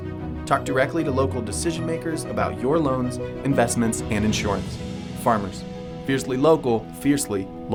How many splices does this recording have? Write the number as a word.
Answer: zero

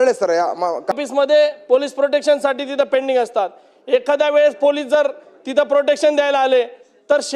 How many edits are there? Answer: one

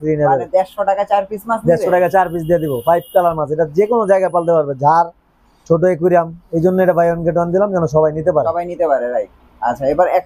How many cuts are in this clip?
zero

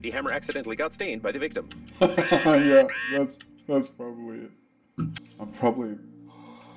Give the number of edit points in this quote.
one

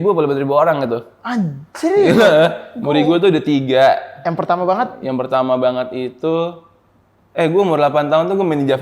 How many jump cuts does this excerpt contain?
one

